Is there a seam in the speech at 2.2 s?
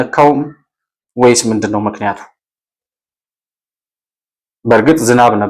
no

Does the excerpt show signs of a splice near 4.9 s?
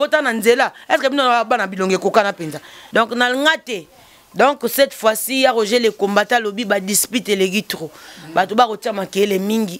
no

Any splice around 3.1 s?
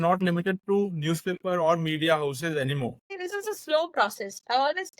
yes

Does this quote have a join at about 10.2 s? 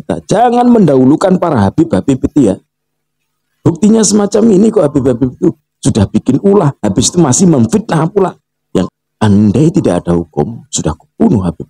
no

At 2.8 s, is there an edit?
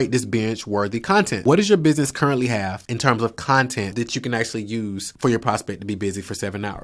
yes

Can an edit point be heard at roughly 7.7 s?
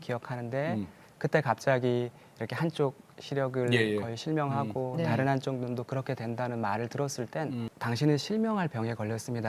yes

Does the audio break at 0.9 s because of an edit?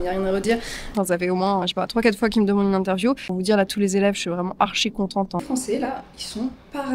yes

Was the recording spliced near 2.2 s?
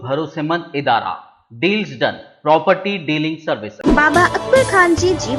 no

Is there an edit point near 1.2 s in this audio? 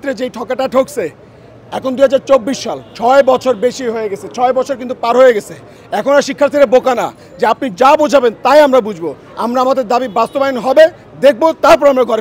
no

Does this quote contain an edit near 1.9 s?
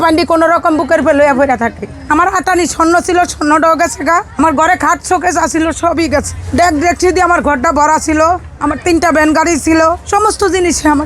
yes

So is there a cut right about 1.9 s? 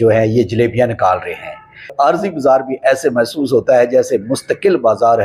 yes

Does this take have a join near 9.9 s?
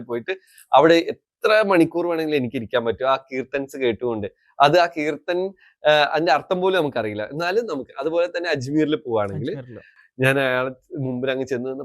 yes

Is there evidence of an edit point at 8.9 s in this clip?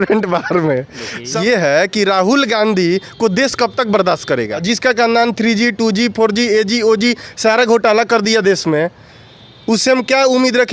no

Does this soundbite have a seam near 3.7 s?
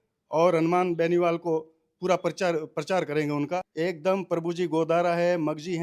yes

